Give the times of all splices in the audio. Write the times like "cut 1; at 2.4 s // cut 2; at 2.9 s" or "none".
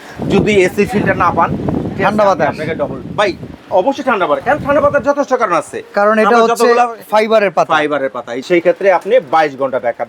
cut 1; at 8.4 s